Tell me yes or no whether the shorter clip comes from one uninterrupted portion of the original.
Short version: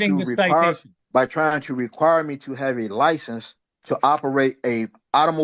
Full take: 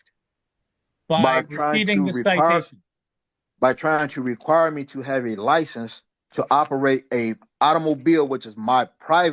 no